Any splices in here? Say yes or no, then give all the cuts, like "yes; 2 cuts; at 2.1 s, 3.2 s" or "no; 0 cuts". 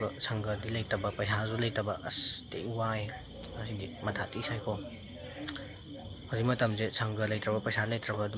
no; 0 cuts